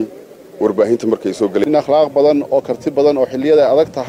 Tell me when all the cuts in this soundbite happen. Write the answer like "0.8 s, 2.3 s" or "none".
1.6 s